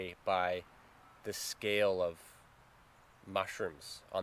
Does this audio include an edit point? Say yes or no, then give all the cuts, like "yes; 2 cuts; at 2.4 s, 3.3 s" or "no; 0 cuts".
no; 0 cuts